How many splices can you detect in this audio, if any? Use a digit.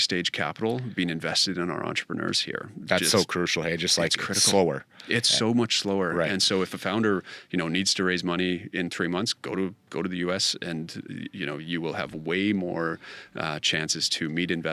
0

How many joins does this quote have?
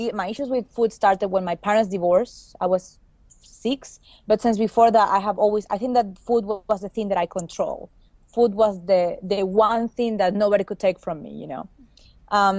1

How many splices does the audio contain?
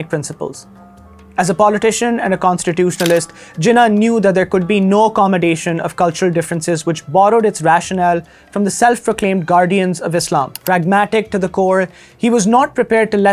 0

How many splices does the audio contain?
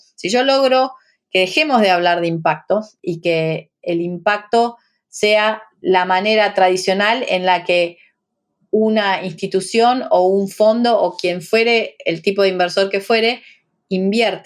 2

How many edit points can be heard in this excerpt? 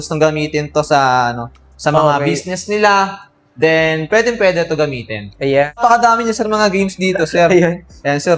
1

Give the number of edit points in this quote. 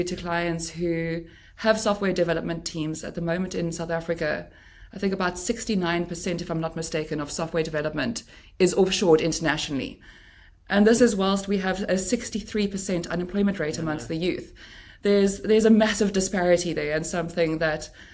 0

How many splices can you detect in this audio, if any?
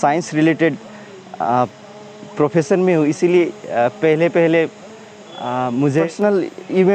1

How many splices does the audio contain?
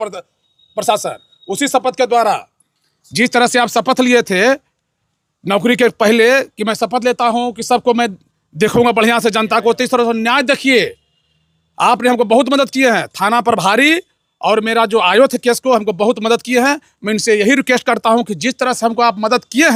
0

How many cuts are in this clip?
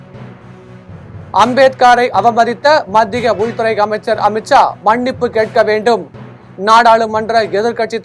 1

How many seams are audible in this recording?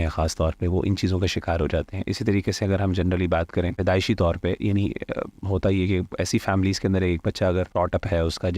2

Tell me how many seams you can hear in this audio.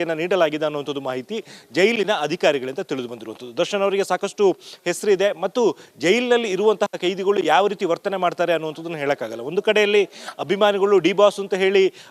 0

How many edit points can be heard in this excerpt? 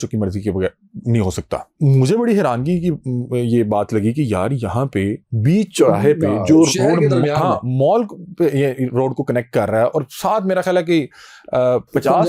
1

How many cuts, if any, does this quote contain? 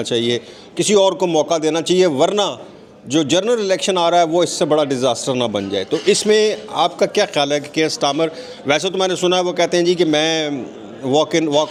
0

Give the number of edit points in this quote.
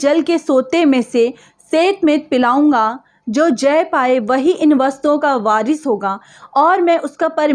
0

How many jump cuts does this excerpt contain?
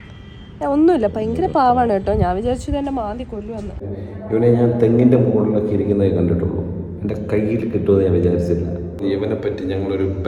2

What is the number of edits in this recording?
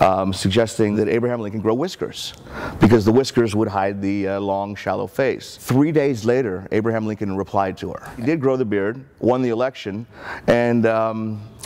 3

